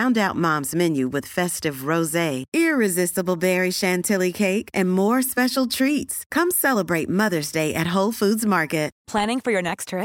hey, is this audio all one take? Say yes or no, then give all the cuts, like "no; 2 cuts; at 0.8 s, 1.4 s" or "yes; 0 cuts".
yes; 0 cuts